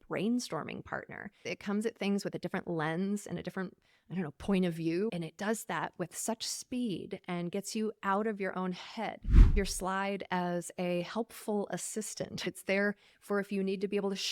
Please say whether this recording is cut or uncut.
cut